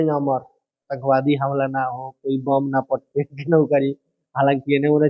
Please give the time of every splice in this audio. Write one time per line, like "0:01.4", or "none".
0:00.9